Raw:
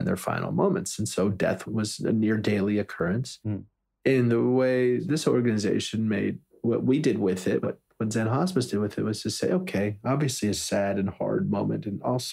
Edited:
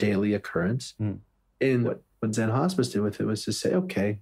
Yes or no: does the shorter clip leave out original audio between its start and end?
yes